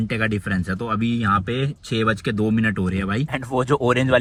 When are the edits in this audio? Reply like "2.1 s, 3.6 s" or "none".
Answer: none